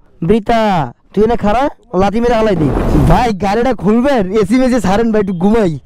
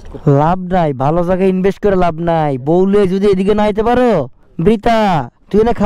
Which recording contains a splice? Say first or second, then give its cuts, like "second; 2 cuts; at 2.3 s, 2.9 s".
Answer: first; 1 cut; at 2.8 s